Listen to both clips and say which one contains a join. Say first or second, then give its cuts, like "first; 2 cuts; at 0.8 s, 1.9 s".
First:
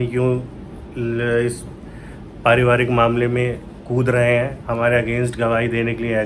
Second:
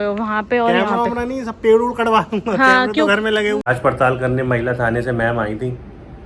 second; 1 cut; at 3.7 s